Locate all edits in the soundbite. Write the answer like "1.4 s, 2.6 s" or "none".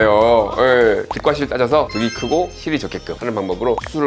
1.1 s, 3.1 s